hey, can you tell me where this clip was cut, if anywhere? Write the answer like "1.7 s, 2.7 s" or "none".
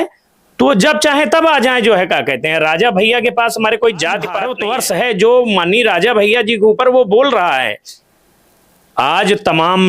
4.5 s